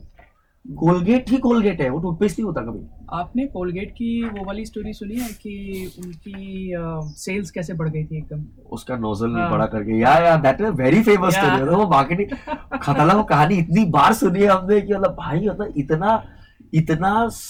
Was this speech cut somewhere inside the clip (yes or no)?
no